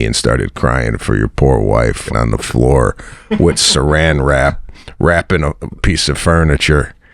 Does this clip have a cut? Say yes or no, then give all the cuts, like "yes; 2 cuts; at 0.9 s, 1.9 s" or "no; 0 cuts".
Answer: yes; 1 cut; at 2.0 s